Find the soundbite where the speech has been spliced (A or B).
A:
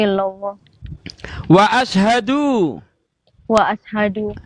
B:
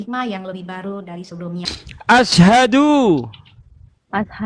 B